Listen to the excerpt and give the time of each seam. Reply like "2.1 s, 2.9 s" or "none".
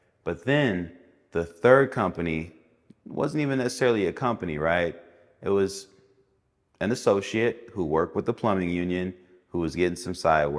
none